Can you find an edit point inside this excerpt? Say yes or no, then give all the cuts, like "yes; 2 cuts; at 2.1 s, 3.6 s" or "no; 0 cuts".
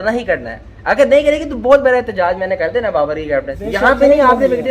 yes; 1 cut; at 3.6 s